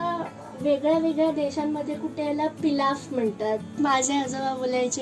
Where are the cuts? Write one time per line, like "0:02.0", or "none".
0:03.8

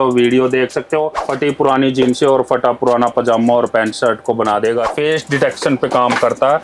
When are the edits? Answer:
0:01.2
0:04.9

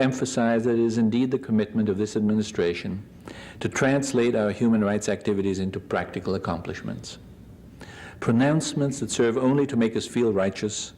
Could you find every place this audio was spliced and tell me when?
none

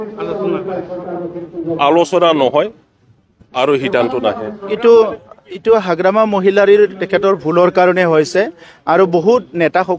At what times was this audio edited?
0:04.7

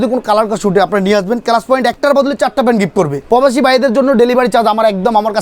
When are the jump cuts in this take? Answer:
0:03.2

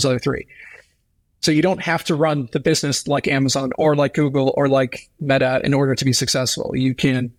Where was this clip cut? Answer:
none

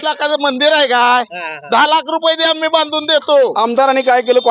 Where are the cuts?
0:03.5

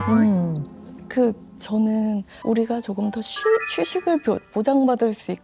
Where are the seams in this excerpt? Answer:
0:02.3

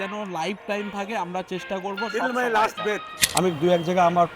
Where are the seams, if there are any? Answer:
0:03.2

